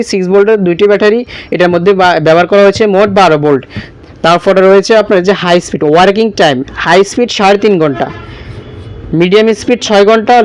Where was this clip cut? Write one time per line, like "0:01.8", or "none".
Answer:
none